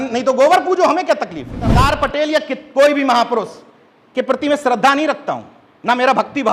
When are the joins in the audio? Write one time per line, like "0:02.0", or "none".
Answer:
0:01.7